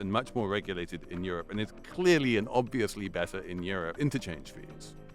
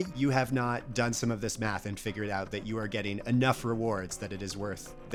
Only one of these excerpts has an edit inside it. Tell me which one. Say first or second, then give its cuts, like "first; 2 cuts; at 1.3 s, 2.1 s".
first; 1 cut; at 3.9 s